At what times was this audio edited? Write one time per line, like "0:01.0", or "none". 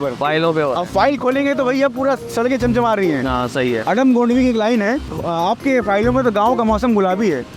0:05.1